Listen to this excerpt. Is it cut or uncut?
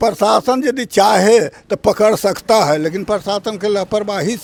uncut